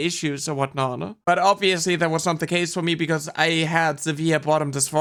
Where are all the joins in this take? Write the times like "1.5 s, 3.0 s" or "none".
none